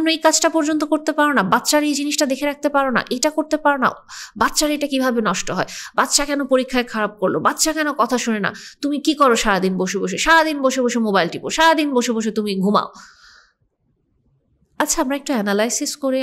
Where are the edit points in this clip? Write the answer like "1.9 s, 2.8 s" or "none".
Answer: none